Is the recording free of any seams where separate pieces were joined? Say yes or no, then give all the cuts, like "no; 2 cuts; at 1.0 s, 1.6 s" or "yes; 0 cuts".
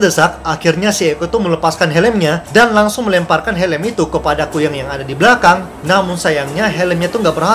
yes; 0 cuts